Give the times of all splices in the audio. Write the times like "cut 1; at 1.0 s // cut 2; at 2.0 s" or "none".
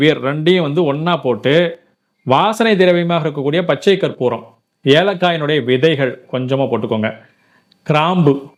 none